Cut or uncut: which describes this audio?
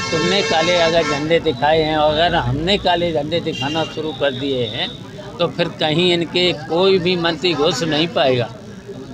uncut